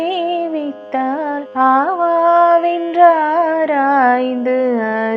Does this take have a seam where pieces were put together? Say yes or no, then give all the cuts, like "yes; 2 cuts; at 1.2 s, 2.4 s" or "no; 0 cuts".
yes; 1 cut; at 1.5 s